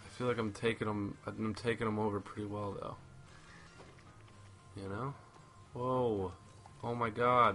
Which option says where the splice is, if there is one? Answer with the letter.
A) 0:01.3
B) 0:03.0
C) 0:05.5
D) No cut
D